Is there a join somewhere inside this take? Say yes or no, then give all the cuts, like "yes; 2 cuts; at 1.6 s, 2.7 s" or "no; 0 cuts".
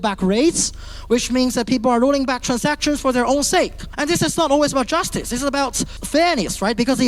no; 0 cuts